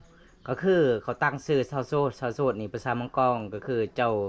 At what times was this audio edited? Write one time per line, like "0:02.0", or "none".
none